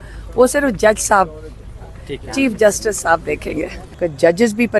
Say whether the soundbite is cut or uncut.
cut